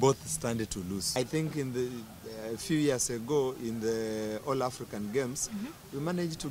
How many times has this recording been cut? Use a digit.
1